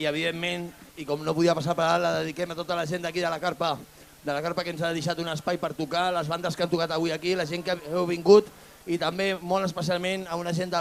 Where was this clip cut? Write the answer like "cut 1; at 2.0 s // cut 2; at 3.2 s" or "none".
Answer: none